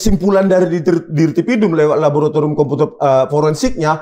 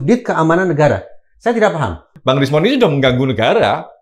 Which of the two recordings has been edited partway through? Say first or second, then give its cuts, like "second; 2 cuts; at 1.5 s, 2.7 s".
second; 1 cut; at 2.0 s